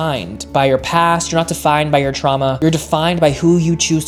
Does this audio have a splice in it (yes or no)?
no